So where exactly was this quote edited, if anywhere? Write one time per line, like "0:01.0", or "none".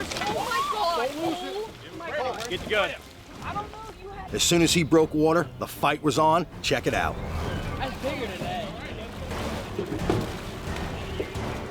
0:04.3